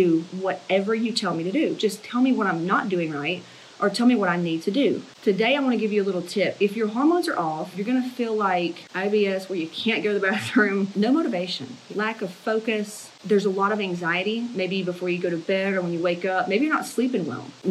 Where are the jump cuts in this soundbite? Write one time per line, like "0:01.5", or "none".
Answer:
0:05.1